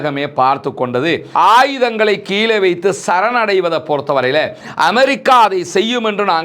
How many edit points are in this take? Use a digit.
1